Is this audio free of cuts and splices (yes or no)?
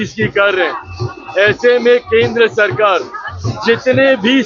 yes